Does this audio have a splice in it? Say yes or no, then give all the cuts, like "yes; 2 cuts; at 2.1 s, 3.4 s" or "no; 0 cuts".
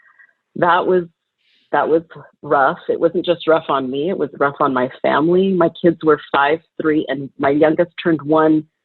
no; 0 cuts